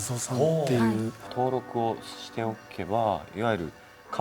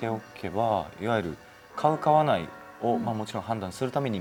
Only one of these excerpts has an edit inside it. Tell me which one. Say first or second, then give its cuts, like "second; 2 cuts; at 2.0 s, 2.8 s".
first; 1 cut; at 1.2 s